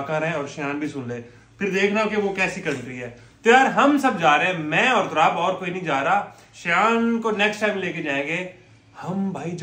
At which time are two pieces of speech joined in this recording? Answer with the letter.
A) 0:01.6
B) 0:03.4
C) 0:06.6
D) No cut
D